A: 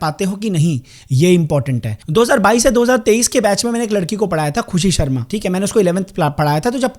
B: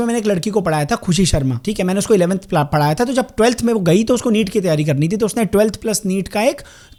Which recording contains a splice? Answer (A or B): A